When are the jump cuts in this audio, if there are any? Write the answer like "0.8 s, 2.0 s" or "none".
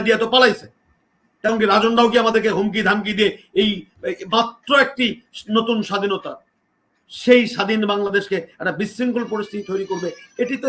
none